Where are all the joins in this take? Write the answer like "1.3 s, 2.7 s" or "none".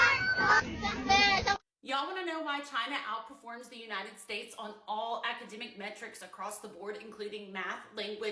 none